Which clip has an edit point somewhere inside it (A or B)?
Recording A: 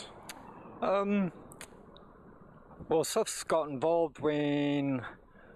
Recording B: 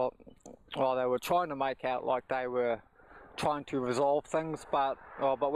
A